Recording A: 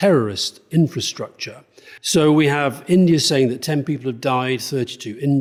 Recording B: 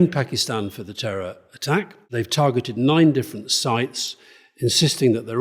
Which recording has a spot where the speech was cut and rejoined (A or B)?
B